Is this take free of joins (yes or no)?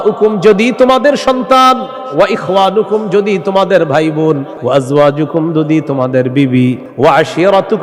no